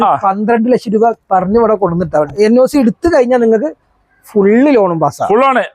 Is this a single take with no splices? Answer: no; 1 cut; at 2.3 s

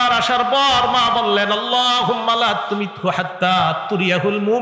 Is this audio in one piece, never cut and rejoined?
yes; 0 cuts

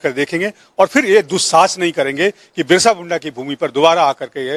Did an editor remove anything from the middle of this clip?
no; 0 cuts

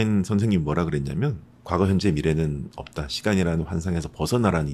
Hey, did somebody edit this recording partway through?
no; 0 cuts

